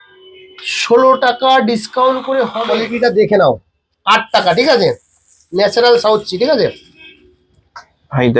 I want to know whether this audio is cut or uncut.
cut